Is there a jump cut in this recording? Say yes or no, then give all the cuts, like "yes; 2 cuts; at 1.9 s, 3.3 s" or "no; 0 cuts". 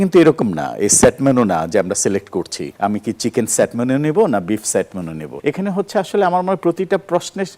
yes; 2 cuts; at 2.6 s, 5.2 s